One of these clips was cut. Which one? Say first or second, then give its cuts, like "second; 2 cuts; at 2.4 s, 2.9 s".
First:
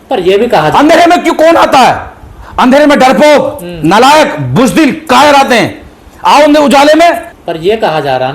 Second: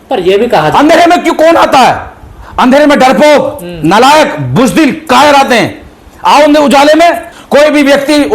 second; 1 cut; at 7.3 s